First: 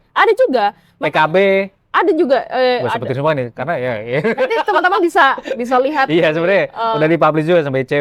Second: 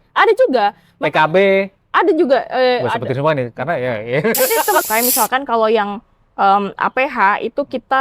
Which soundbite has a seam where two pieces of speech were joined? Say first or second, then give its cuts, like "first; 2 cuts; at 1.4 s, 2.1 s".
second; 1 cut; at 4.8 s